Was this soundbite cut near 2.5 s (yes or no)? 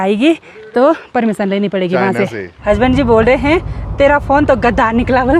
yes